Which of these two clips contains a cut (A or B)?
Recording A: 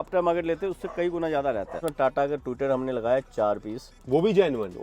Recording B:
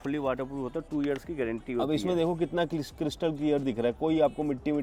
A